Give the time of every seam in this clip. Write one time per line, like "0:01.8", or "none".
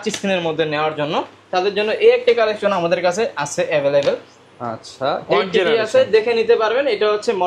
none